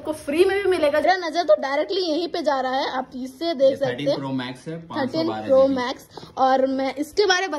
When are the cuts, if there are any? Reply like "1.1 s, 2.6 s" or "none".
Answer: 1.1 s

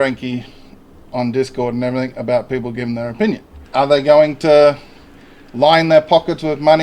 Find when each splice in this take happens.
3.5 s

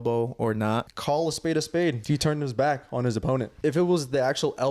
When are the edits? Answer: 0.9 s, 2.0 s, 3.5 s

